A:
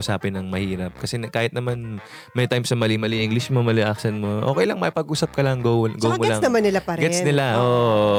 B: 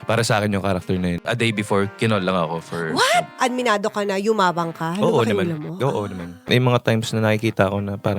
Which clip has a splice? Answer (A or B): B